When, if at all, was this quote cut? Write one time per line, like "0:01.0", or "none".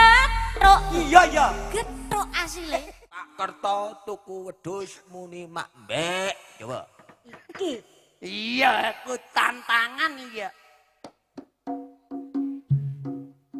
0:03.3